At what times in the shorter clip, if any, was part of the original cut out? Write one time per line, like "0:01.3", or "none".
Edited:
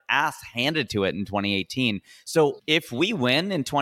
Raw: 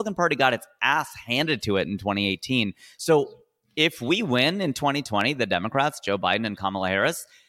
0:02.6